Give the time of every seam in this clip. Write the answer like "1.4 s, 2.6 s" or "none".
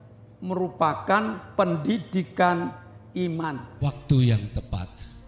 3.7 s